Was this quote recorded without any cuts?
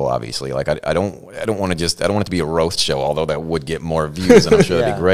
yes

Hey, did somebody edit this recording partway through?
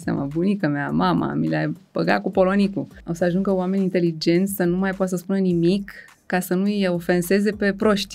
yes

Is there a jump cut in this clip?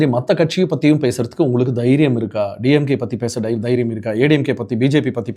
no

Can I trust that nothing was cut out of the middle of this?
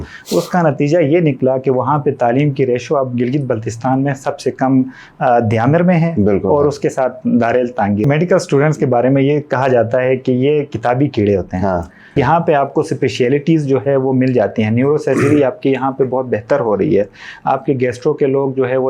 no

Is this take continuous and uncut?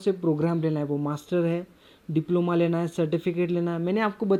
yes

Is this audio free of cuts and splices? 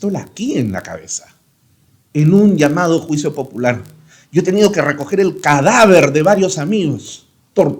yes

